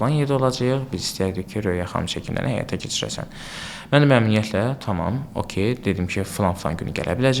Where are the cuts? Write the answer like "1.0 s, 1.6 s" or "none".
none